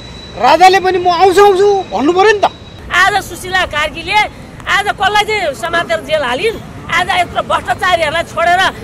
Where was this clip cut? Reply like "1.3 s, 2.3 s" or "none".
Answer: 2.8 s